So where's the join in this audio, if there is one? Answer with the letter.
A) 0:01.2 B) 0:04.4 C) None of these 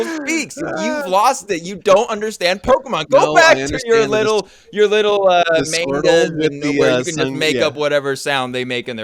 C